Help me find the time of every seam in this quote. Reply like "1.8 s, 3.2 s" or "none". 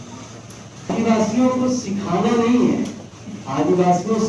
0.9 s